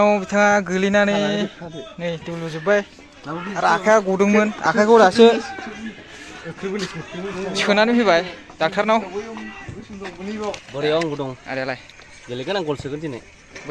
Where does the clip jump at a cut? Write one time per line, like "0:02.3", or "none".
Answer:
0:10.6